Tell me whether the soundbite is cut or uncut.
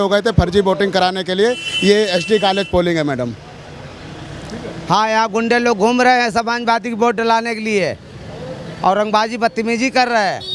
uncut